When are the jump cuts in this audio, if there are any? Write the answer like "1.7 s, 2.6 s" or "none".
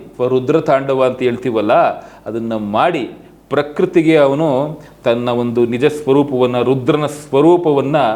none